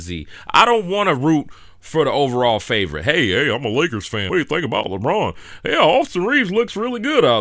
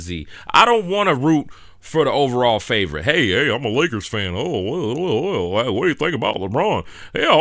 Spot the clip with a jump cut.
first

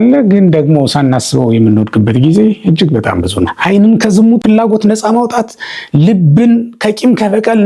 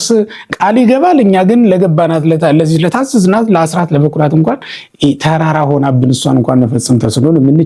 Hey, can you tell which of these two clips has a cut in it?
first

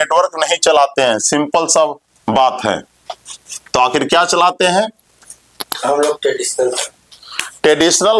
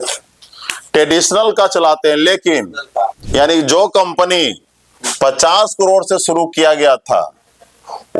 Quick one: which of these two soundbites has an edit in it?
second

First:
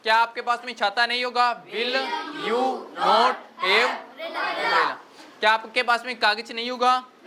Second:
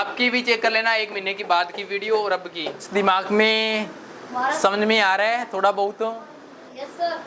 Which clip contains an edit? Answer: second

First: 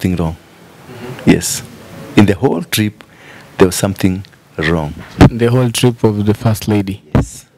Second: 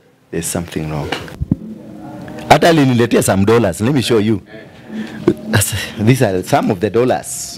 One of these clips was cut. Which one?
second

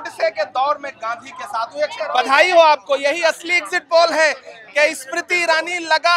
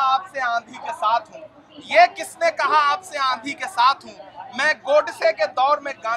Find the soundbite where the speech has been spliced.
first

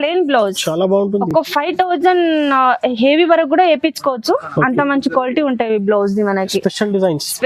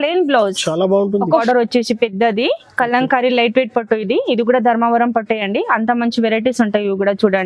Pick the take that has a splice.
second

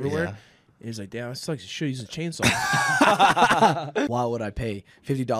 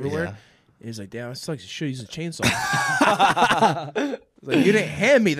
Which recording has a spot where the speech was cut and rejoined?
first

